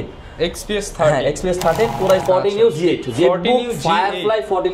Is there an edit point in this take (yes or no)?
yes